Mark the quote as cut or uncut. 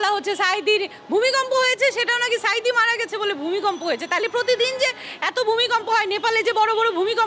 uncut